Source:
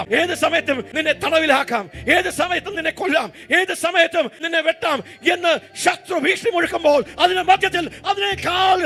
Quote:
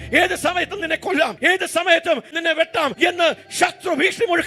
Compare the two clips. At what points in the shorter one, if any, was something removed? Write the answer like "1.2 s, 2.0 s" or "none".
1.3 s, 2.9 s

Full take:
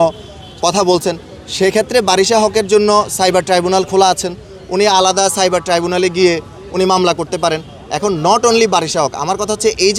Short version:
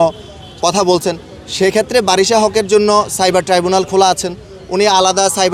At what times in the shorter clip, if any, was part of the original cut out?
none

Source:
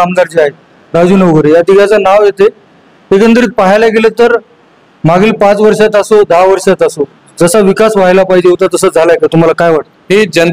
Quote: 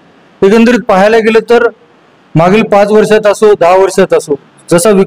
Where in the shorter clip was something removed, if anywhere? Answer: none

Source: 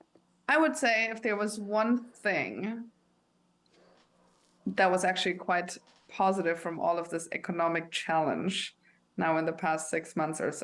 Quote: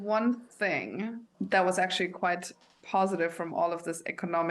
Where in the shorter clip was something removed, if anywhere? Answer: 1.2 s

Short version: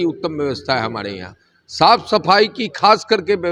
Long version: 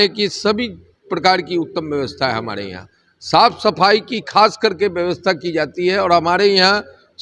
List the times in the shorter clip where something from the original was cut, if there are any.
none

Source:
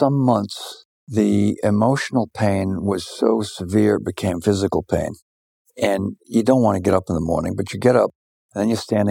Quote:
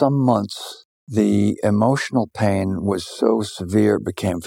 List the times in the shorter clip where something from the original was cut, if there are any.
none

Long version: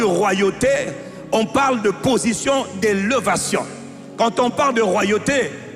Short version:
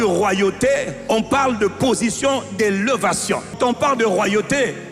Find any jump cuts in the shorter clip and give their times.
0.9 s, 3.6 s

